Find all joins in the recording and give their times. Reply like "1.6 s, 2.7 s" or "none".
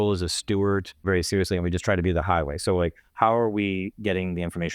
1.0 s